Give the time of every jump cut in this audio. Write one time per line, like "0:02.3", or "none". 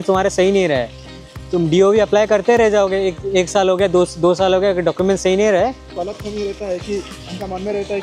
0:05.9